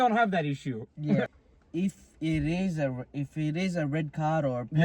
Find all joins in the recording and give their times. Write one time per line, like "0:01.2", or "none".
0:01.3